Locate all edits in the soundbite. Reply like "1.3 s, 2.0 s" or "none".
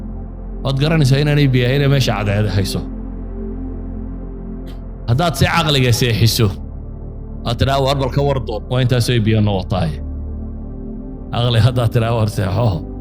3.1 s, 4.5 s